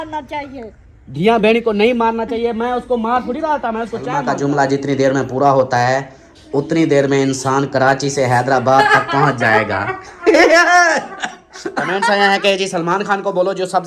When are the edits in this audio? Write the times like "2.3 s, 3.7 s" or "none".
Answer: 4.2 s, 11.9 s